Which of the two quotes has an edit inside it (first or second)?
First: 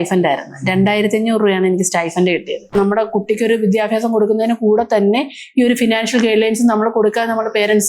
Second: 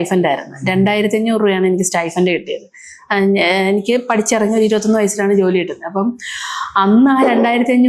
first